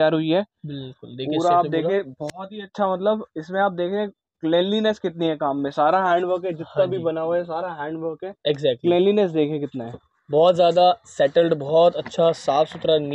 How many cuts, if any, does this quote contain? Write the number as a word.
zero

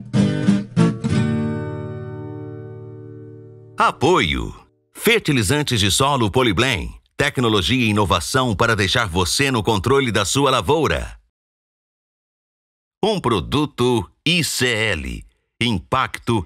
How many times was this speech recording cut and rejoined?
one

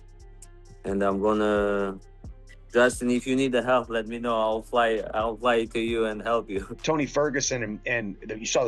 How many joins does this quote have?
one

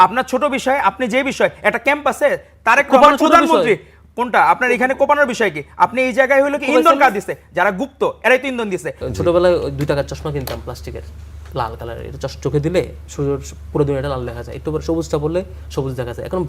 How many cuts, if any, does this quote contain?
one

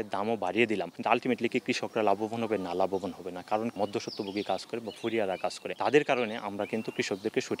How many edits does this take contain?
three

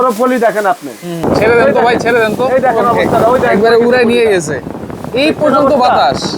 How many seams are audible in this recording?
one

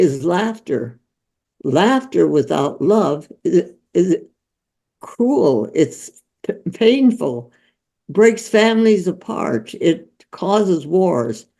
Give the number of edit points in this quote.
zero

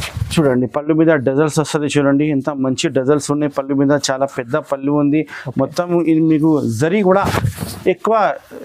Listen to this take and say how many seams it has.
zero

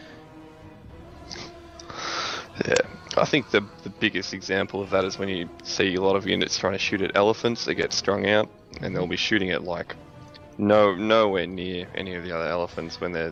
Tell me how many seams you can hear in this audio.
zero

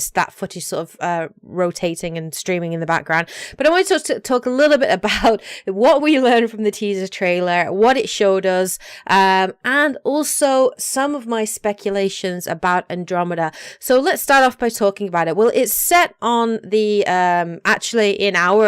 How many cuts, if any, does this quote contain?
one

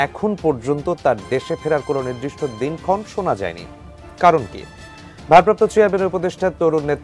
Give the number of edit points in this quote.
zero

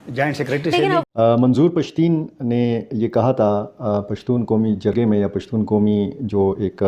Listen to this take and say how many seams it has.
one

